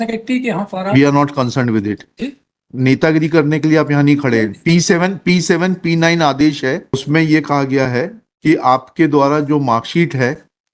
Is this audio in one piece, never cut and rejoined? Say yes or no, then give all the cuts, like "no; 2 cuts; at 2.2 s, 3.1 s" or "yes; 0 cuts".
no; 1 cut; at 7.0 s